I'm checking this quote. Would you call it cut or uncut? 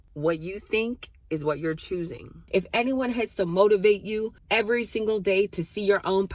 cut